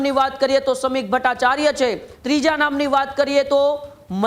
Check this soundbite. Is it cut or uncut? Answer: cut